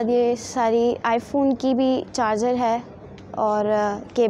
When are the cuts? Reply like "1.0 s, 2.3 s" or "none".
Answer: none